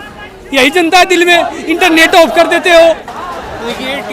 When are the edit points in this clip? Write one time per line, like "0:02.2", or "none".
0:03.2